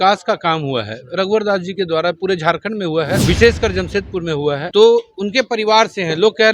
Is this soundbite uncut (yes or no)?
no